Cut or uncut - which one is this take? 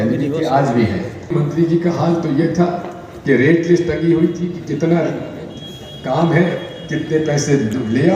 cut